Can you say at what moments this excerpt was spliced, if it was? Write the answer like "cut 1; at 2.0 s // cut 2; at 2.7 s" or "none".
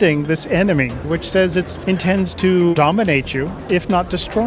cut 1; at 1.0 s // cut 2; at 1.7 s // cut 3; at 3.1 s